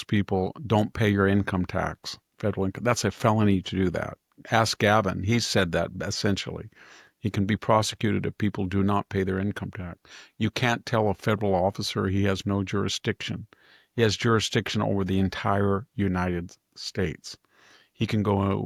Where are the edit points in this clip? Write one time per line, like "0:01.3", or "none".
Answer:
none